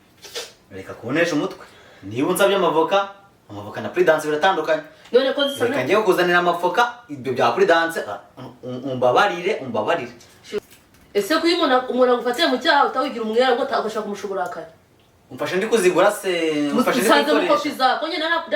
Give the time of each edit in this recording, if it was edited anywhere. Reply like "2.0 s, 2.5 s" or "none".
10.6 s